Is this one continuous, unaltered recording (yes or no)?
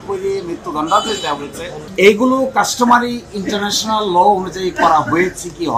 no